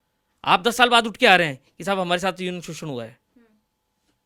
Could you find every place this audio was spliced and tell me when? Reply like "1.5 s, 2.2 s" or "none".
none